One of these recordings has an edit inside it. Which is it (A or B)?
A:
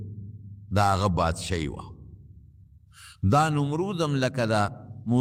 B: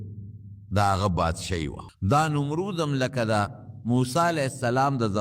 B